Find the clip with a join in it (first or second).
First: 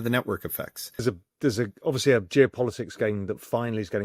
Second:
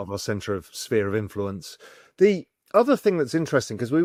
first